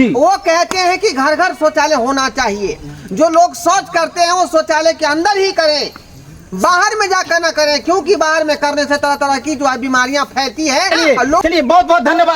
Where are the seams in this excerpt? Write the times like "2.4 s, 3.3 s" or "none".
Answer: 11.2 s